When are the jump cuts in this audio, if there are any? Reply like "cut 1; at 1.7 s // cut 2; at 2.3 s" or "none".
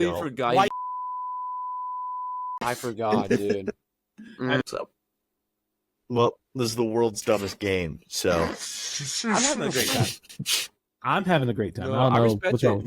cut 1; at 4.6 s